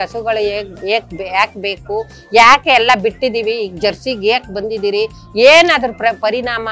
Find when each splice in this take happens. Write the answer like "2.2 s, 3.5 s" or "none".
none